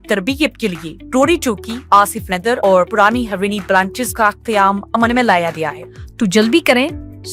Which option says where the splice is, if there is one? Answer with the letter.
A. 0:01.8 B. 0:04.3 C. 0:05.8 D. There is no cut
C